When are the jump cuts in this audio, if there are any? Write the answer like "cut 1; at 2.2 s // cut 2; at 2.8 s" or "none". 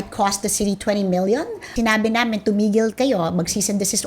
cut 1; at 1.7 s